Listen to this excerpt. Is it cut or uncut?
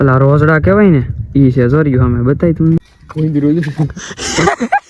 cut